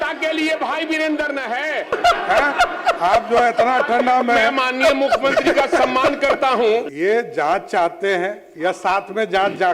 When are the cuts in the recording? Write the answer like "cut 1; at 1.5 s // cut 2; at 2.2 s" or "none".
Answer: cut 1; at 1.9 s // cut 2; at 6.9 s

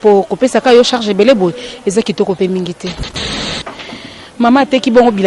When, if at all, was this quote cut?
cut 1; at 3.3 s

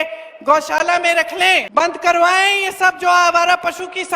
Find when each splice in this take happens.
cut 1; at 1.7 s

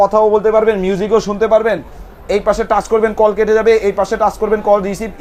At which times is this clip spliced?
none

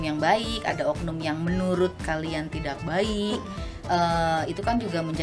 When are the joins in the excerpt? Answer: none

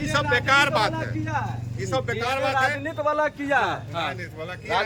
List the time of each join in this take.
none

